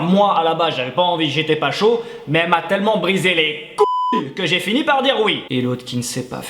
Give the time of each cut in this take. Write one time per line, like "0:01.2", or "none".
0:05.4